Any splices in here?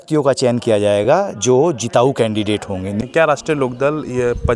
yes; 1 cut; at 3.1 s

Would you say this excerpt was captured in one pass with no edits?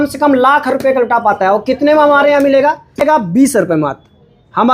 no; 1 cut; at 3.0 s

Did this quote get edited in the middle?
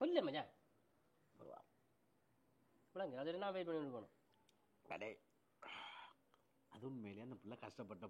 no; 0 cuts

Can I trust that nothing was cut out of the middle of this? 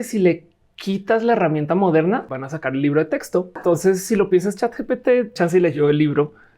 no; 3 cuts; at 2.3 s, 3.6 s, 5.3 s

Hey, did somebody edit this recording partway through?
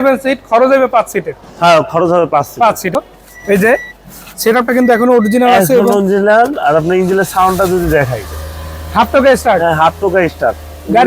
yes; 1 cut; at 2.9 s

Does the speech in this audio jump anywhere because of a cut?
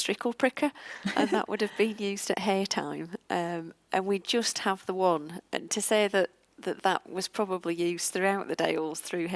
no; 0 cuts

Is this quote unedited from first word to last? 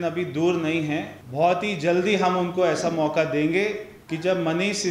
no; 2 cuts; at 1.2 s, 3.9 s

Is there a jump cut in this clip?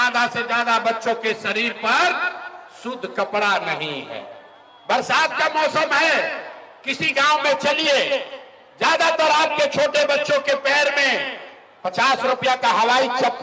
no; 0 cuts

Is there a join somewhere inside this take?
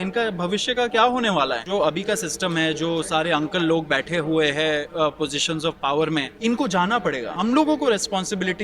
yes; 3 cuts; at 1.6 s, 6.3 s, 7.3 s

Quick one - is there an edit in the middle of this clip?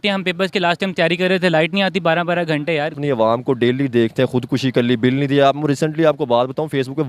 yes; 1 cut; at 2.9 s

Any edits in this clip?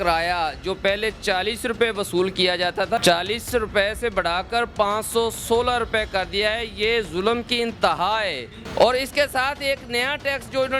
yes; 2 cuts; at 3.0 s, 8.6 s

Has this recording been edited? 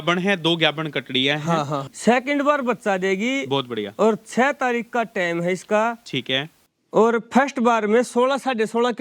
yes; 1 cut; at 1.9 s

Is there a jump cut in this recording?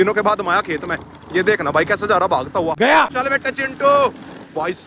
no; 0 cuts

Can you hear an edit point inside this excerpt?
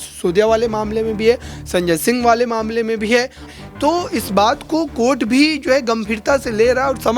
yes; 1 cut; at 3.4 s

